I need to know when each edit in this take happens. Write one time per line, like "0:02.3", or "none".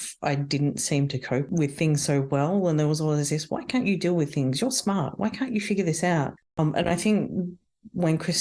0:01.5
0:06.3